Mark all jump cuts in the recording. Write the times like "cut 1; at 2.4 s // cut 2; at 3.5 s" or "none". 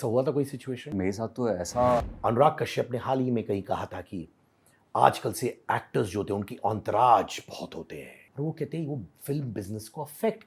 cut 1; at 0.9 s // cut 2; at 2.1 s // cut 3; at 8.2 s